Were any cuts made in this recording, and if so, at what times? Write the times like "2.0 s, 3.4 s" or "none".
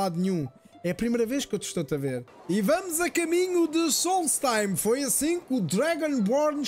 2.3 s